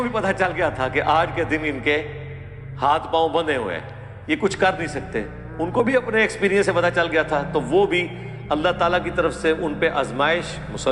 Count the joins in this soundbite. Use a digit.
0